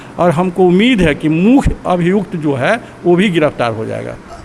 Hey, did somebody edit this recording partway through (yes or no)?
no